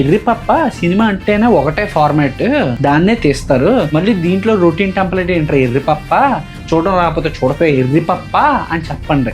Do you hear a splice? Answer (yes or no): no